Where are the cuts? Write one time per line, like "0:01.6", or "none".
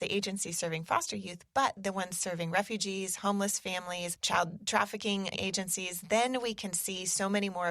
0:04.1
0:05.3